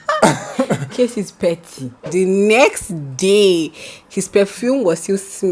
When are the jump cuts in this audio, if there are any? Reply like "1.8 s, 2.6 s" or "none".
2.1 s